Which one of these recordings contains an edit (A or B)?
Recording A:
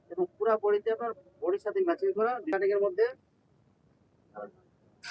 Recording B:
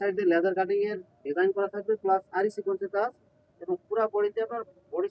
A